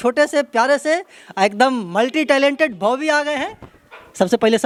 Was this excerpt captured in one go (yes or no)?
yes